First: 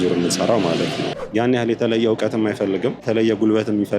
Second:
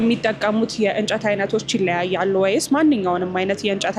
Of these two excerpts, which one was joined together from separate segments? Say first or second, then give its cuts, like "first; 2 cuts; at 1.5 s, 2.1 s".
first; 2 cuts; at 1.1 s, 3.0 s